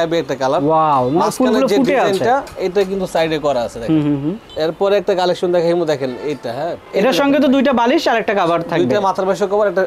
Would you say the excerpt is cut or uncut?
uncut